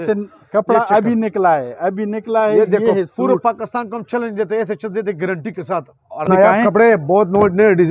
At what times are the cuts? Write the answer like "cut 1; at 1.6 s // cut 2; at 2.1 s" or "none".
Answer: cut 1; at 6.3 s